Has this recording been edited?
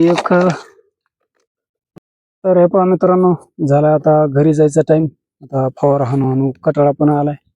yes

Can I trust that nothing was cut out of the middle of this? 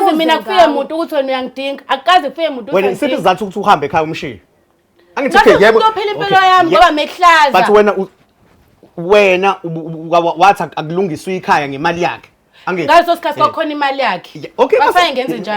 yes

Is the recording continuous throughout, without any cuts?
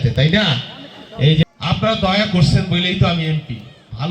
no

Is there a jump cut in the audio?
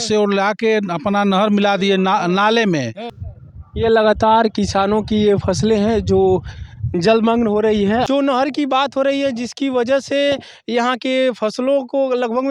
yes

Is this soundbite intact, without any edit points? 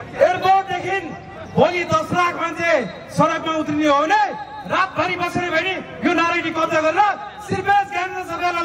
yes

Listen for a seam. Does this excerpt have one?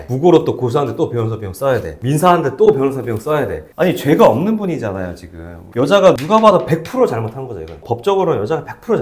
yes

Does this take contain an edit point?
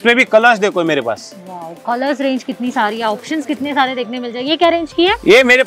no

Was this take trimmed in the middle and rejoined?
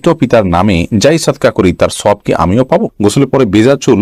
yes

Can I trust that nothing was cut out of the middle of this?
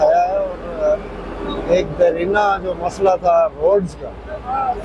yes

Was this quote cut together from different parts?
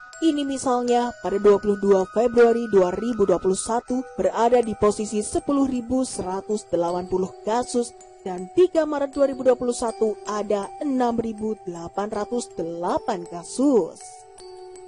no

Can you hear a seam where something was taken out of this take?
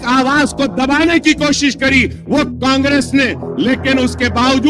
yes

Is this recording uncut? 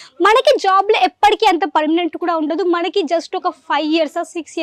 yes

